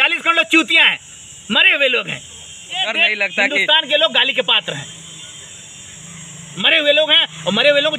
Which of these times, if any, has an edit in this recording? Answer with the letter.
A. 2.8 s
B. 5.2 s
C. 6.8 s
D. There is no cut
A